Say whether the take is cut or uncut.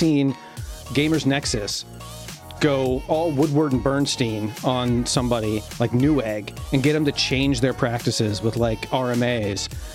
uncut